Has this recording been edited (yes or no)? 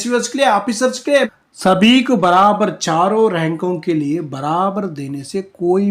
yes